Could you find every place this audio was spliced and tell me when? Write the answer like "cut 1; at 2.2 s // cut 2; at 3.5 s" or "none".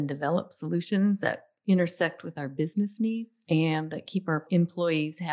cut 1; at 3.3 s // cut 2; at 4.5 s